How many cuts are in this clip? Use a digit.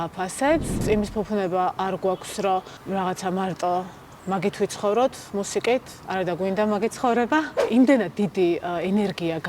3